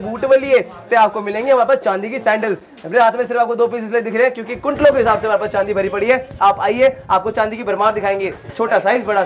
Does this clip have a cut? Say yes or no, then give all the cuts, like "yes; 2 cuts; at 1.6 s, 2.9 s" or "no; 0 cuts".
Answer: no; 0 cuts